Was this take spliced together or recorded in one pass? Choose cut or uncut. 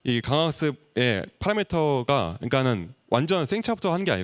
uncut